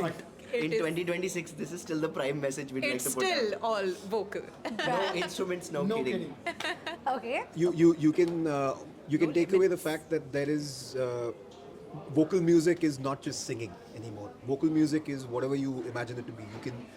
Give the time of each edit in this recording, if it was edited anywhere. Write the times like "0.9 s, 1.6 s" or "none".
none